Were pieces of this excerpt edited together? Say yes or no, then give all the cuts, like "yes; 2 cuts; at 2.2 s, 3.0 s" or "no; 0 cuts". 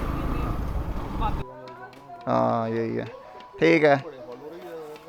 yes; 1 cut; at 1.4 s